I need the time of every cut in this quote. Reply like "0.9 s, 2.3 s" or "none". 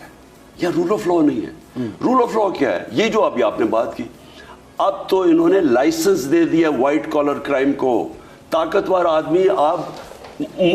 none

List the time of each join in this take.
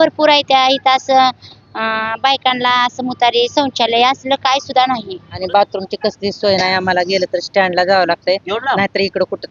5.5 s

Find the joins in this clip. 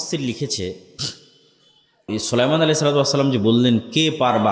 2.1 s

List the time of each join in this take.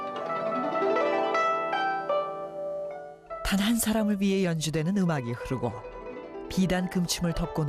6.2 s

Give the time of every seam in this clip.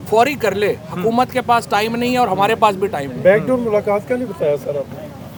none

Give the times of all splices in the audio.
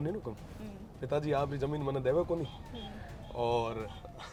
none

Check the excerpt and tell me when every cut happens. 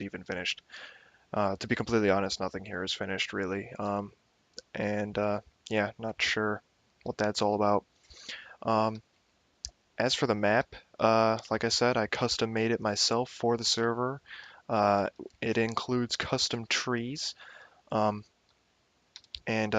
2.3 s

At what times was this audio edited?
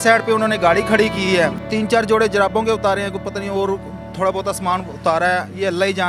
1.6 s

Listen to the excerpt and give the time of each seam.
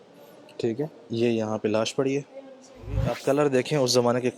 3.1 s

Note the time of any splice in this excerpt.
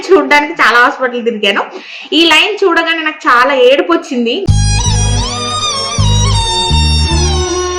none

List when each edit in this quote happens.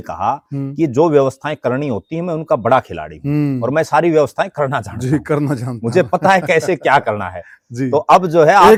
none

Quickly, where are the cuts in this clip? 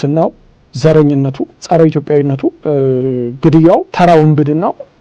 1.5 s, 2.6 s, 3.9 s

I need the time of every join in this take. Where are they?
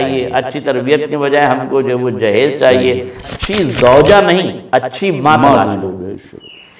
3.2 s

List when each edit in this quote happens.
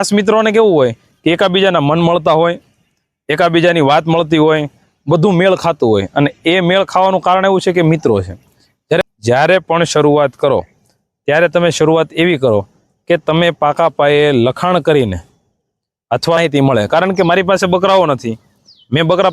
9.0 s, 16.4 s

